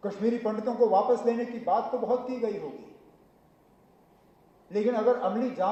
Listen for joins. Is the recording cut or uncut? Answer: uncut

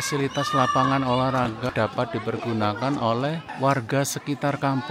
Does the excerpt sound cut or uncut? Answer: cut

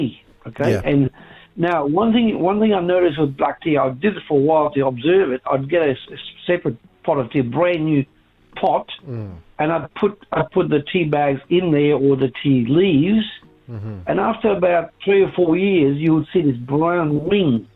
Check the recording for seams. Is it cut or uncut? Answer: uncut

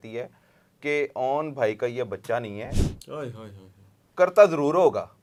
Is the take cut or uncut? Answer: uncut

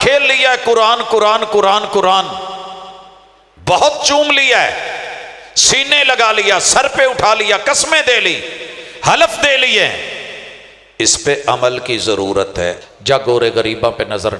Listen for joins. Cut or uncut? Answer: cut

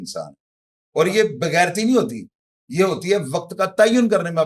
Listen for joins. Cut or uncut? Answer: uncut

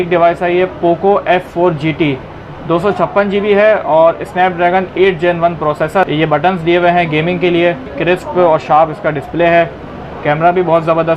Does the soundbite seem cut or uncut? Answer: cut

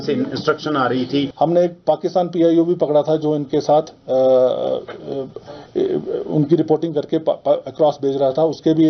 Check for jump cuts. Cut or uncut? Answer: cut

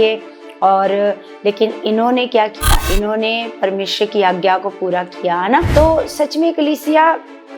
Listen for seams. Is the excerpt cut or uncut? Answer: cut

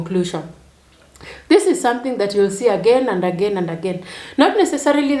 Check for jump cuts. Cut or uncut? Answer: uncut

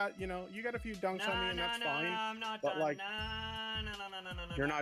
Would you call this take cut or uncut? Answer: uncut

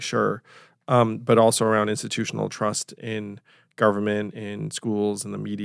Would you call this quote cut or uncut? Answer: uncut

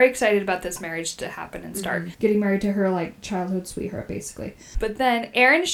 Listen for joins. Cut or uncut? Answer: cut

